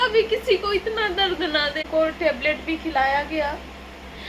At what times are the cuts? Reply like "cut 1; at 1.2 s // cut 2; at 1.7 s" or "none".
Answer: cut 1; at 1.9 s